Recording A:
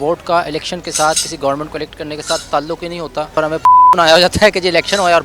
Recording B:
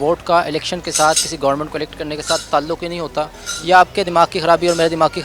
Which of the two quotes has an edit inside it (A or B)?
A